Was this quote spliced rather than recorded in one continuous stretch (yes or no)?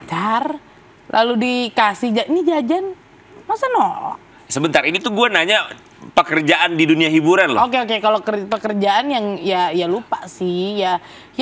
no